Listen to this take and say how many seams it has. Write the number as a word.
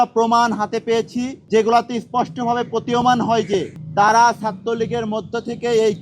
two